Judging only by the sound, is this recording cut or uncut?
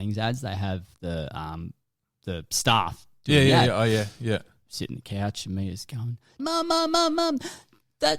cut